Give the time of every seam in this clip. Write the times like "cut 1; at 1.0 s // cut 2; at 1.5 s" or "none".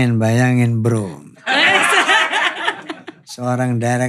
none